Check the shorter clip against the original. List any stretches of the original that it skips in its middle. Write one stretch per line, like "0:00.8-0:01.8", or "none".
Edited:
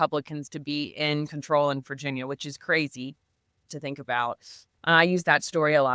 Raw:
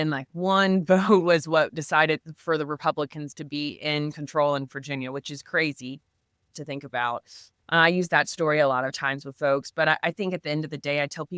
none